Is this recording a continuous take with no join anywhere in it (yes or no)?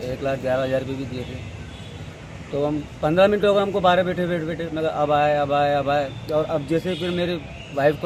yes